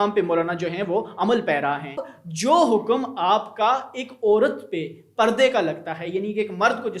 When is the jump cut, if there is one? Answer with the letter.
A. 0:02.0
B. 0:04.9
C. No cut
A